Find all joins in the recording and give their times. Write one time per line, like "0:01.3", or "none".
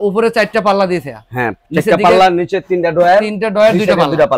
none